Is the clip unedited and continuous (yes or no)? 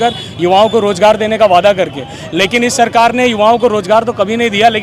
yes